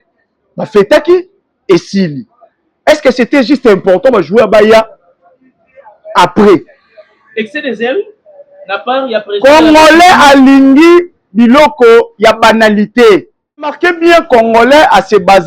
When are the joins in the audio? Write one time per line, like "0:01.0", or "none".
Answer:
0:13.8